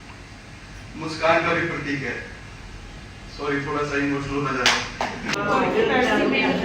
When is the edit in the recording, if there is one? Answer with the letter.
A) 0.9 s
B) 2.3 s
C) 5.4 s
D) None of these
C